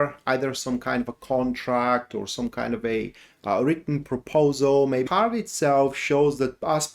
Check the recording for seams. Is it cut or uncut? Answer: cut